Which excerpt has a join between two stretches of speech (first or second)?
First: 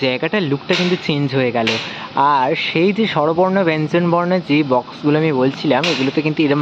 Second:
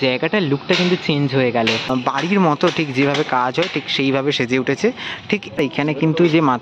second